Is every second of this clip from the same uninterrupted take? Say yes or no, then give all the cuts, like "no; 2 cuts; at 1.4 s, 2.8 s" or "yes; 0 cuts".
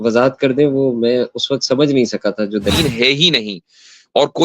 no; 1 cut; at 2.7 s